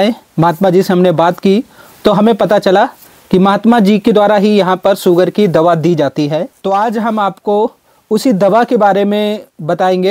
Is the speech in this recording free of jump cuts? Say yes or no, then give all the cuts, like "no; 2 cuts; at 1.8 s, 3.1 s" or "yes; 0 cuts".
no; 1 cut; at 6.5 s